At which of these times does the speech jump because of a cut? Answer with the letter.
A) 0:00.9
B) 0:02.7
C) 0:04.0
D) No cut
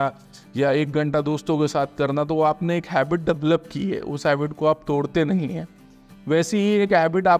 D